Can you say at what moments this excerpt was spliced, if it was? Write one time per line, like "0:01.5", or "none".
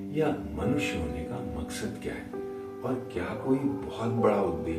none

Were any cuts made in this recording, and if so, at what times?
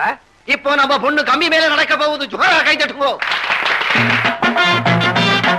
none

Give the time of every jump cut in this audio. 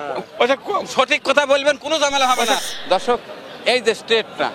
0:02.6

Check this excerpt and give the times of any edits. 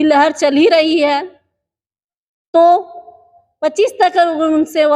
none

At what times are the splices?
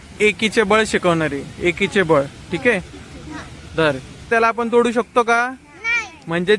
0:04.3

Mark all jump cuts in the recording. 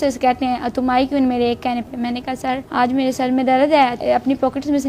0:02.6
0:04.0

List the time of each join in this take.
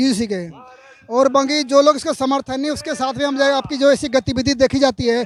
none

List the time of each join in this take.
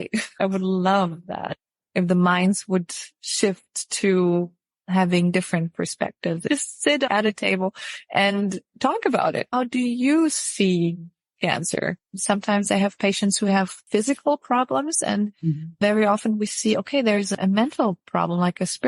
0:13.8

